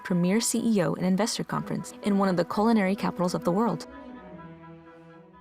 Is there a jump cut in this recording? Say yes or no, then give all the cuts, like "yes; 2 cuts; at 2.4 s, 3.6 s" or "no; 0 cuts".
yes; 1 cut; at 3.8 s